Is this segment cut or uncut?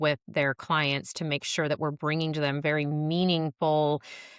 uncut